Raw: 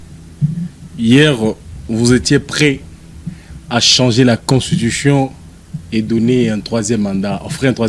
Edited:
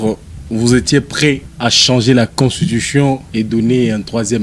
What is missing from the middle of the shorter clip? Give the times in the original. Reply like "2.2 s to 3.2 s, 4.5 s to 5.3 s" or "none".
2.9 s to 3.6 s, 5.4 s to 5.8 s

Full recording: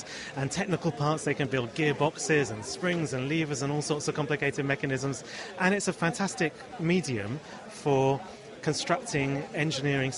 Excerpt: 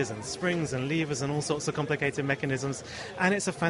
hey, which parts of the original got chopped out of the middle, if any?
none

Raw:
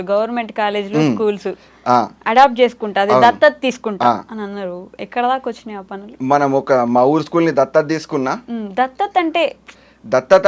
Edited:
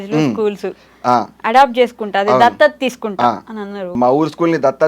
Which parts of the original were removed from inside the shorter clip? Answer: 4.8 s to 6.9 s

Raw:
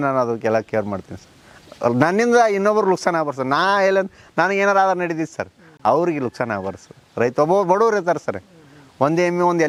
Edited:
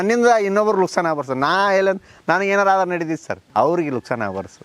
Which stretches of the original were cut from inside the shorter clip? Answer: 5.4 s to 5.6 s

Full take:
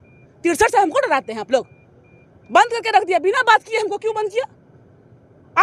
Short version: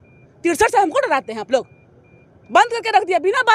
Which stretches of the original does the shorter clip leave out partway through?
none

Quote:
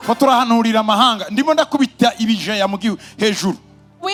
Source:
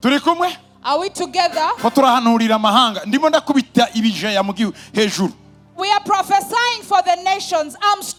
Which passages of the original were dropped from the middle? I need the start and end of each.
none

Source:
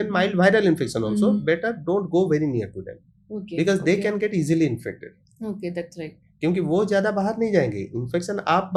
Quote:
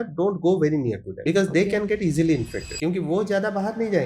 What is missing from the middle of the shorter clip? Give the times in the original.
2.8 s to 3.4 s, 4.9 s to 6.2 s

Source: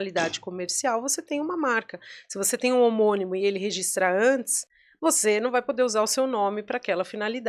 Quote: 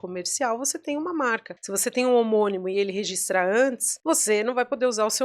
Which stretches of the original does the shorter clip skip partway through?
2.0 s to 2.2 s, 4.5 s to 4.8 s

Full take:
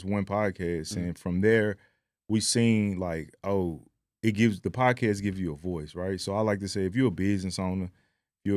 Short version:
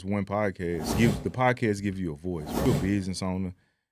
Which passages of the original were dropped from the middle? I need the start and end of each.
0.9 s to 4.3 s, 6.1 s to 7.0 s

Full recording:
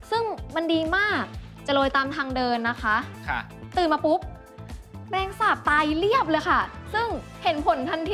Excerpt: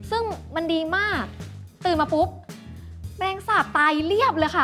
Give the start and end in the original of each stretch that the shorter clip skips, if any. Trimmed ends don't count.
1.5 s to 3.4 s

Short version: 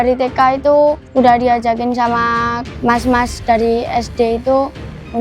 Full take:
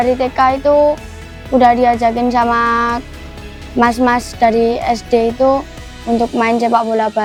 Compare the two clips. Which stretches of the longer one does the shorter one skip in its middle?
1.0 s to 1.4 s, 3.0 s to 3.6 s

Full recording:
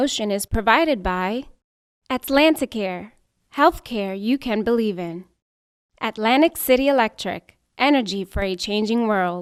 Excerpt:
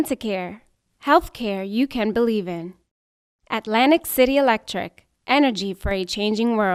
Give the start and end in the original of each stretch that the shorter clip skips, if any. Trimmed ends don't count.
none

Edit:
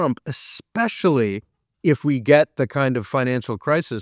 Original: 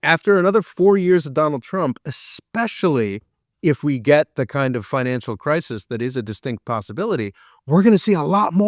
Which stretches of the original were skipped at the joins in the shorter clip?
none

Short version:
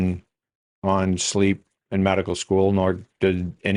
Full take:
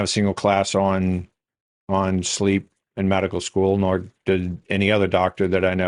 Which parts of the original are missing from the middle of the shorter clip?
none

